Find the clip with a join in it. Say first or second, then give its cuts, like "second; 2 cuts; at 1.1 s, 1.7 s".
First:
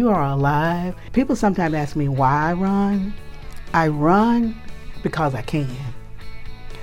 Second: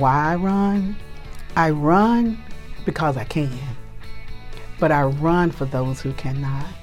first; 1 cut; at 1.0 s